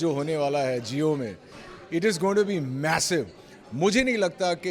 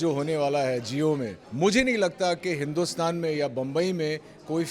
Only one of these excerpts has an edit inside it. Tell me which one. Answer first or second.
second